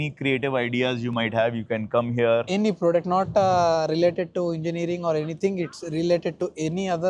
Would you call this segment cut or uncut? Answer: uncut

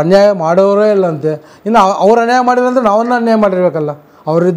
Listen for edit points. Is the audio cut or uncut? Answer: uncut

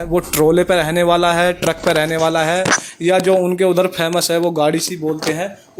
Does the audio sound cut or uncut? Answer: uncut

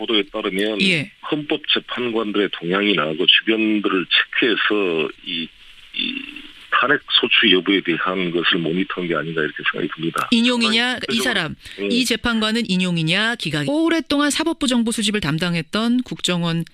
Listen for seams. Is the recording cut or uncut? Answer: uncut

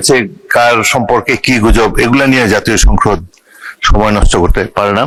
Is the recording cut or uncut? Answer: uncut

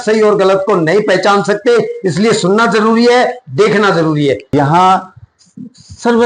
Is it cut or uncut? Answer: cut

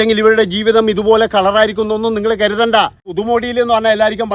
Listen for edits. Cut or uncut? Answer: cut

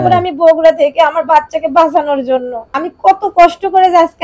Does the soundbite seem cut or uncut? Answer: cut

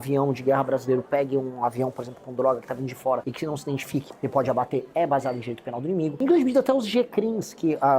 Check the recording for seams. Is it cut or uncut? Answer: cut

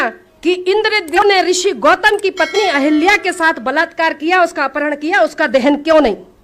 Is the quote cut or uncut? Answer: cut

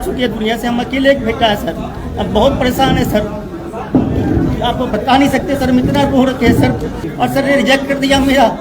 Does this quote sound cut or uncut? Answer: cut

